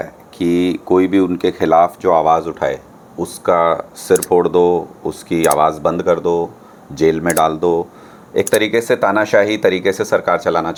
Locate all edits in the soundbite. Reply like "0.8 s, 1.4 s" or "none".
none